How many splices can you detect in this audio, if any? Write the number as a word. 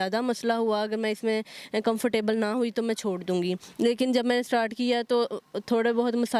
zero